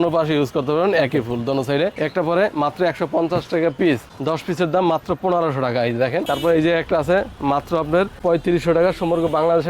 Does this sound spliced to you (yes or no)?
yes